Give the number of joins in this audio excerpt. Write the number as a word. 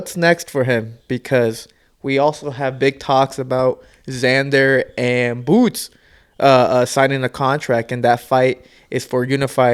zero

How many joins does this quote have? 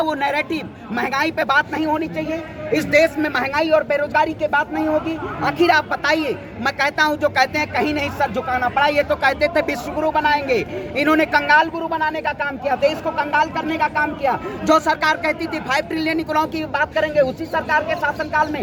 zero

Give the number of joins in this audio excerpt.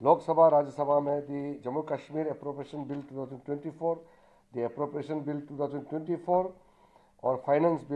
zero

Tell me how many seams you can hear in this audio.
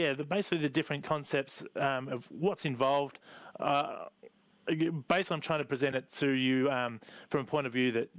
zero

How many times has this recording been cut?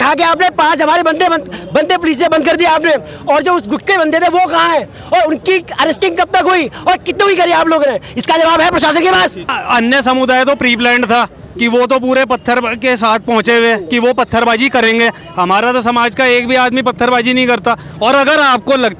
one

